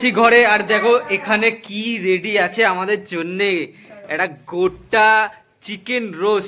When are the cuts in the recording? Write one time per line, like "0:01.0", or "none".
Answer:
none